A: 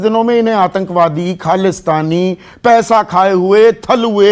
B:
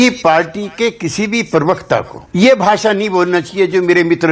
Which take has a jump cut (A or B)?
A